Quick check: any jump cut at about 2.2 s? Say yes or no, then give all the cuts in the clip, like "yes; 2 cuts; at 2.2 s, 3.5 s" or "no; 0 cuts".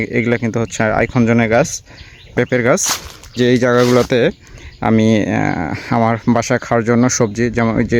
yes; 2 cuts; at 2.2 s, 3.3 s